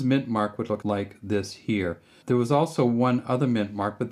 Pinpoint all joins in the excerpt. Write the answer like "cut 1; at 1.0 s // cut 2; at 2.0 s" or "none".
cut 1; at 0.8 s // cut 2; at 2.1 s